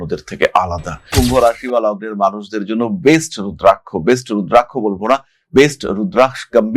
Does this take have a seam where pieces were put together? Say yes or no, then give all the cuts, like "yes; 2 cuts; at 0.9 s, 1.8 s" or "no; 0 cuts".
yes; 1 cut; at 1.1 s